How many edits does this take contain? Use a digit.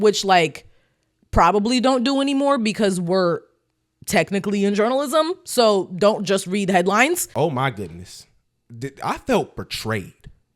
1